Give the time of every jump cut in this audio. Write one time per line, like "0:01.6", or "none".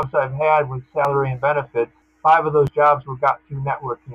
0:02.0